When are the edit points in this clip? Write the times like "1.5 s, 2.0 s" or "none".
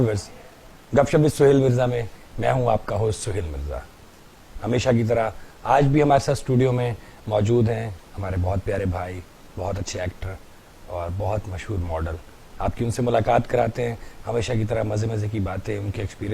none